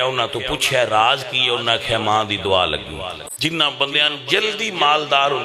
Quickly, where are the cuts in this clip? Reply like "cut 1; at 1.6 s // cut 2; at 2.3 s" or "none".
cut 1; at 3.2 s